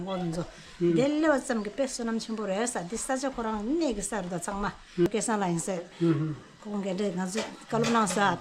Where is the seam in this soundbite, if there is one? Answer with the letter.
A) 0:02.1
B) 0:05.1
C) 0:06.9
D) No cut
B